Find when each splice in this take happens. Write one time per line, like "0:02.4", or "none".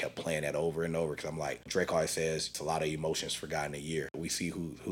0:01.7
0:02.6
0:04.2